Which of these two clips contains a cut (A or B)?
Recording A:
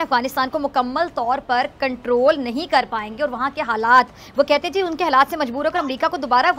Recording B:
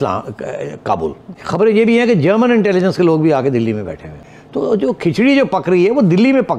B